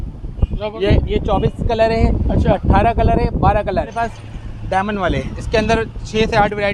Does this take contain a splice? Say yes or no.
yes